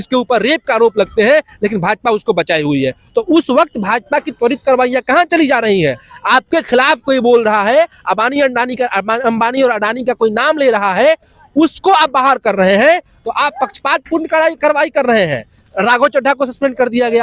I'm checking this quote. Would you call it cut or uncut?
uncut